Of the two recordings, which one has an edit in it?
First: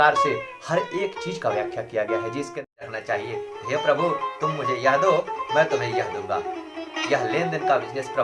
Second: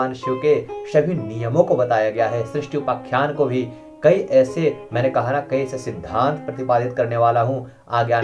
first; 1 cut; at 2.6 s

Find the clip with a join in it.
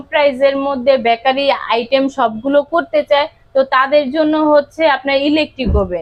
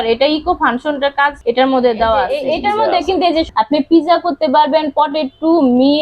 second; 3 cuts; at 1.4 s, 2.3 s, 3.5 s

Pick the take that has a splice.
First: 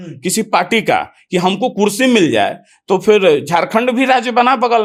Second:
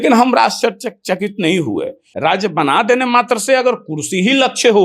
second; 1 cut; at 2.0 s

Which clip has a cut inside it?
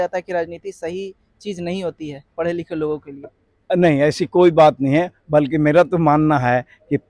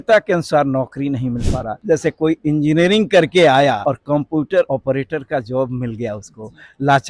second; 3 cuts; at 1.7 s, 3.8 s, 4.7 s

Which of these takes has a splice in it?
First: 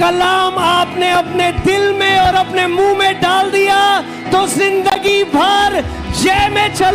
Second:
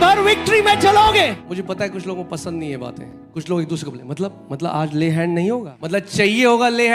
second; 3 cuts; at 1.4 s, 3.1 s, 5.7 s

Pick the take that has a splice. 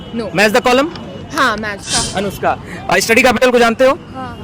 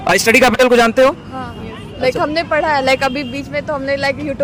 first; 1 cut; at 1.8 s

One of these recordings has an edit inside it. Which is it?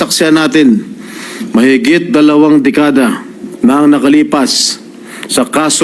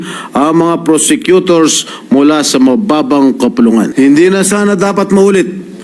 second; 1 cut; at 3.9 s

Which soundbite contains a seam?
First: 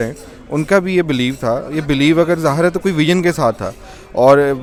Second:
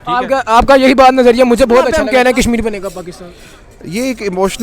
second; 1 cut; at 2.0 s

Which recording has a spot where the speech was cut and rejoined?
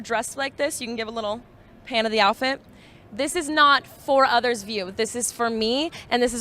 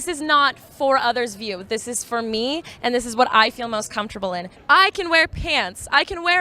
second; 1 cut; at 4.5 s

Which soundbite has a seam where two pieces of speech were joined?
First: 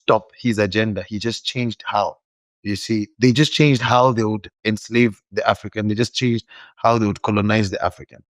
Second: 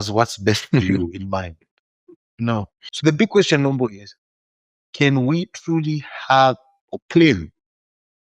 second; 1 cut; at 2.8 s

